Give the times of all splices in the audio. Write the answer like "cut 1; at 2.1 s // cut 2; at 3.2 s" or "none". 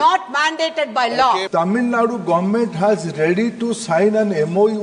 cut 1; at 1.5 s